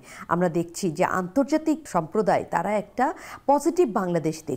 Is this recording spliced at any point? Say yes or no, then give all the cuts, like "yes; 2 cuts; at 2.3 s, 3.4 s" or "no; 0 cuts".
yes; 1 cut; at 1.8 s